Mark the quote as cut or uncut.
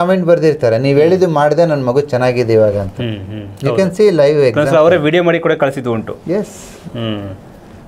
uncut